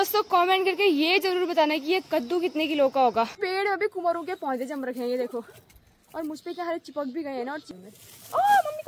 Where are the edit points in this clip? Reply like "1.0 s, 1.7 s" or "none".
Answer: 3.4 s, 7.6 s